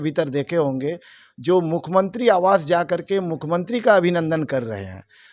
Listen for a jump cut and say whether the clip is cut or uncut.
uncut